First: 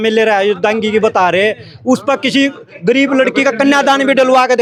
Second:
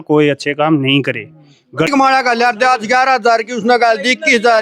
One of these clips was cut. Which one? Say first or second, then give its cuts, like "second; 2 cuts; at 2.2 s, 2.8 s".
second; 1 cut; at 1.9 s